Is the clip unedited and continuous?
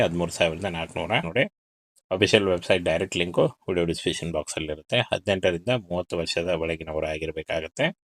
no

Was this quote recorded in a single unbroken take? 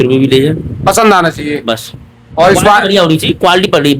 yes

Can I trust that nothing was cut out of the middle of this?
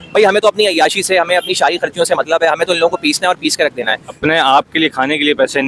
no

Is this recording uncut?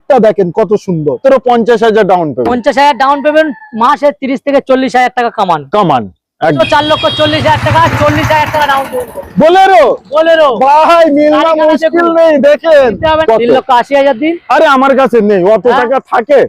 no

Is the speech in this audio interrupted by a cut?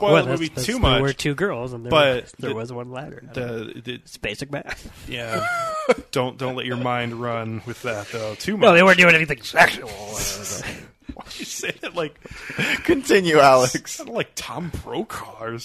no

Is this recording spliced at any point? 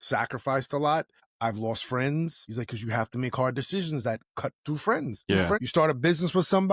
yes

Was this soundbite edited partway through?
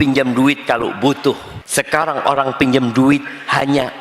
yes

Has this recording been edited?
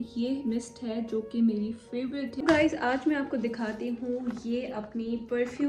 yes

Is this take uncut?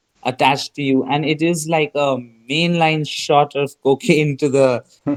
yes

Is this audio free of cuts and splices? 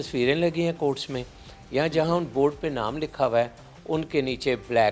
yes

